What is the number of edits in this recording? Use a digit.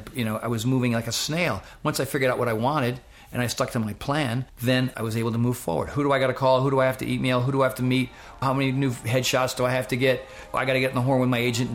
3